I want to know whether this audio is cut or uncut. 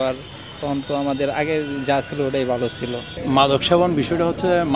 cut